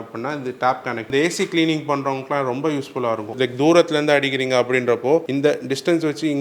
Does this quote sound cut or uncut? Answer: cut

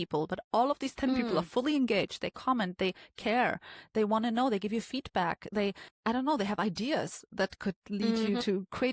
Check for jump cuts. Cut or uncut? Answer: cut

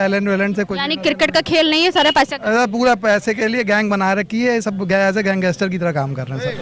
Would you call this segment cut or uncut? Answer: uncut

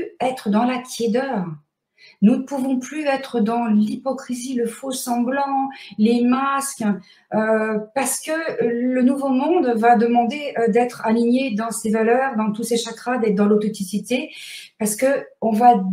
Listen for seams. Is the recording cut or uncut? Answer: uncut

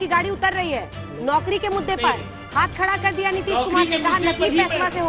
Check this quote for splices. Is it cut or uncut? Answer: uncut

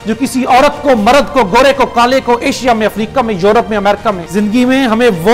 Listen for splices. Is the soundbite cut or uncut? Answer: cut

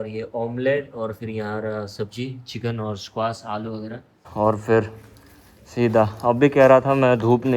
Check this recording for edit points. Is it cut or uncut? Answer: cut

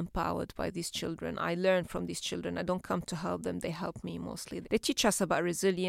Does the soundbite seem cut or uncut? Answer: cut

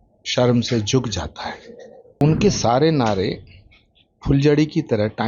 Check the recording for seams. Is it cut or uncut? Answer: cut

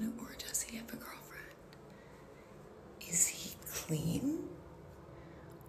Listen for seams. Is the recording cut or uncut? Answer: uncut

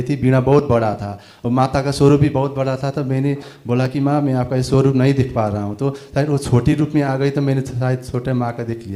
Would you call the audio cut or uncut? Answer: uncut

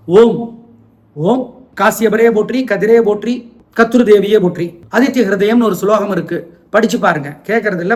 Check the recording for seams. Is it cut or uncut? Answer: uncut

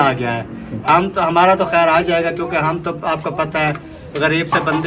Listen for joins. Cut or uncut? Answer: uncut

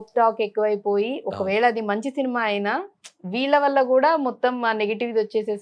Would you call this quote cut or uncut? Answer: uncut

